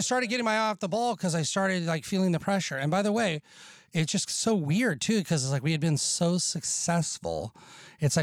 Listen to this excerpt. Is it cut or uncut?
uncut